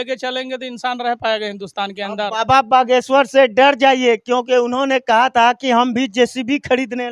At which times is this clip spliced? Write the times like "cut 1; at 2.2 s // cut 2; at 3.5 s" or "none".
none